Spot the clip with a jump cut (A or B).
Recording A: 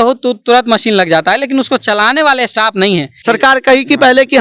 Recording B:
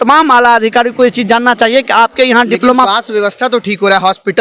A